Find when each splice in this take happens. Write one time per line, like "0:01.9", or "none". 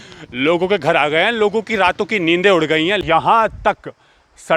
0:03.0